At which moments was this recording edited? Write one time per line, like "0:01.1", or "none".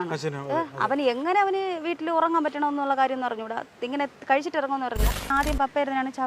0:05.3

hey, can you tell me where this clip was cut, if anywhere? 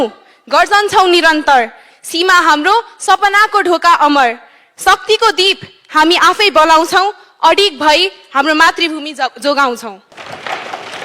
0:10.1

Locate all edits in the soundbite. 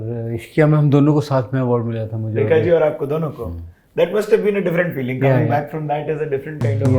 none

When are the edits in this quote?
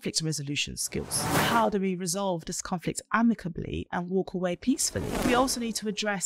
0:01.4
0:05.2

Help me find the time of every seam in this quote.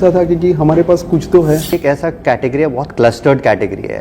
0:01.7

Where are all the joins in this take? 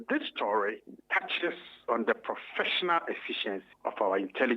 0:00.9
0:03.7

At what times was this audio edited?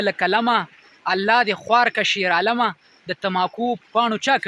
none

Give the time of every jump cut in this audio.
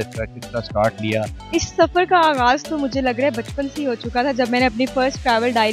0:01.4

